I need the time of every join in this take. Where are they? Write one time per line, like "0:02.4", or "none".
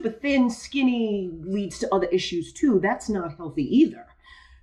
none